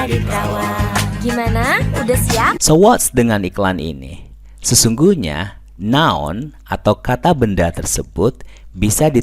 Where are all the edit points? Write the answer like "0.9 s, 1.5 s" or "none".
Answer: 1.1 s